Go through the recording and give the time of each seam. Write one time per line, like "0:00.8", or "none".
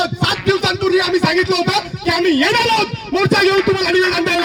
none